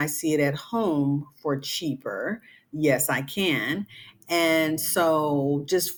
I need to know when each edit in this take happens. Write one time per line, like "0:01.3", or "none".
none